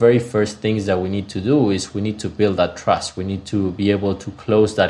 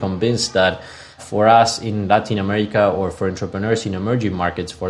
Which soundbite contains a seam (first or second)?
second